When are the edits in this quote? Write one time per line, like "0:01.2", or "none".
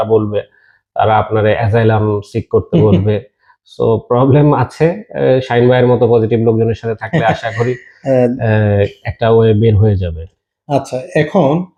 none